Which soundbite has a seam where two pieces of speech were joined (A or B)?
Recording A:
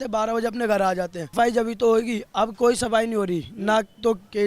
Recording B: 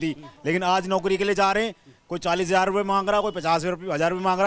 A